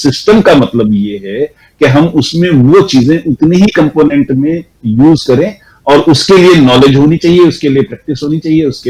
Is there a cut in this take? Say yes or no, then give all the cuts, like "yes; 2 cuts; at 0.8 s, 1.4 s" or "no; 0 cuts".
no; 0 cuts